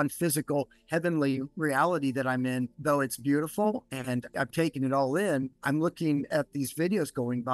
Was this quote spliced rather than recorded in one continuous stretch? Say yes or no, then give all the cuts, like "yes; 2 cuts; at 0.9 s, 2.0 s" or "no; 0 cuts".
no; 0 cuts